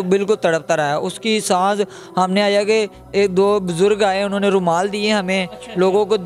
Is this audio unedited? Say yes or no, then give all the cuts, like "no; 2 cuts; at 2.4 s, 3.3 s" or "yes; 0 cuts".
yes; 0 cuts